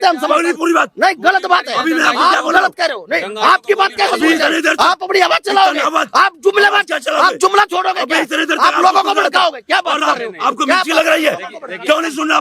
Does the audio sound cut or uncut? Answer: uncut